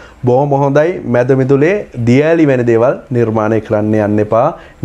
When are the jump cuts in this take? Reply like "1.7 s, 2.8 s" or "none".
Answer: none